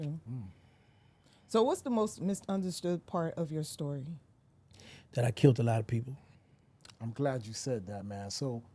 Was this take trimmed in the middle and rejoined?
no; 0 cuts

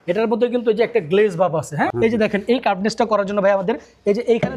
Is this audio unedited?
no; 1 cut; at 1.9 s

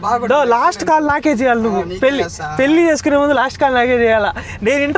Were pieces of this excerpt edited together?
no; 0 cuts

